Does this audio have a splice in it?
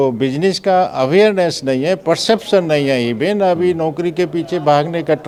no; 0 cuts

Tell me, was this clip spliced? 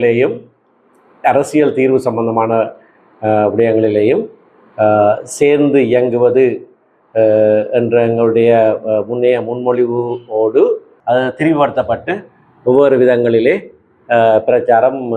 yes; 1 cut; at 10.9 s

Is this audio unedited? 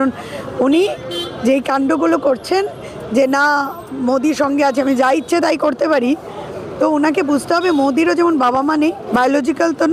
no; 1 cut; at 9.0 s

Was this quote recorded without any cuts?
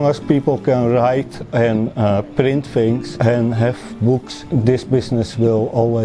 no; 2 cuts; at 3.1 s, 4.3 s

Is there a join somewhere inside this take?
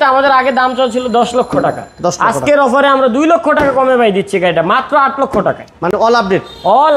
no; 0 cuts

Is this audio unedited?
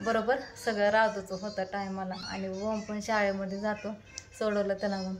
yes; 0 cuts

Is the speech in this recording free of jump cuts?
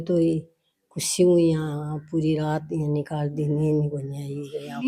yes; 0 cuts

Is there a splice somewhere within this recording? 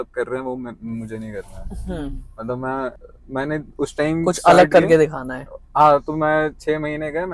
no; 0 cuts

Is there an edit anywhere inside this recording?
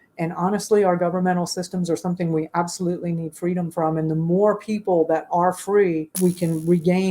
yes; 1 cut; at 6.1 s

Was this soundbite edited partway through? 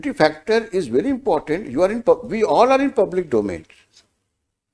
no; 0 cuts

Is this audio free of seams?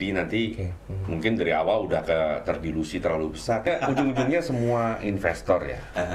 no; 1 cut; at 3.7 s

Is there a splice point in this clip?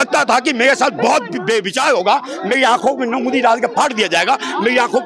no; 0 cuts

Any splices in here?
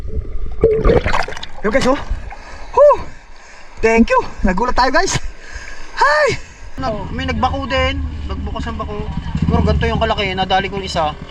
yes; 1 cut; at 6.8 s

